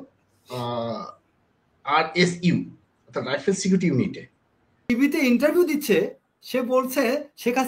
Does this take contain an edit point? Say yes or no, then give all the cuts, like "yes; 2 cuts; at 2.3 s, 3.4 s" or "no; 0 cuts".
yes; 1 cut; at 4.9 s